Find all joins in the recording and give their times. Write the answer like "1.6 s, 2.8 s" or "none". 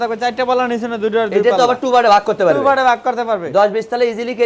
none